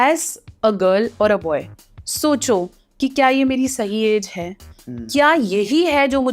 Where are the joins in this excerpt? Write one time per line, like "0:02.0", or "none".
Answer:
none